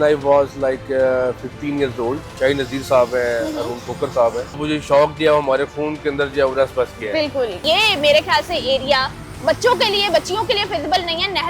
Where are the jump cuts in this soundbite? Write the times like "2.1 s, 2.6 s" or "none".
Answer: 2.3 s, 4.6 s, 7.6 s